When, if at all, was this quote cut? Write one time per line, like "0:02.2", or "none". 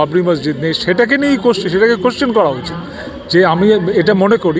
none